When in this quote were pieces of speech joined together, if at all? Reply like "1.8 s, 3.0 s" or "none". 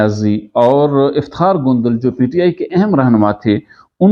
none